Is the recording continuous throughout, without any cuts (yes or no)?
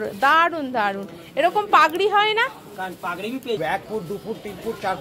no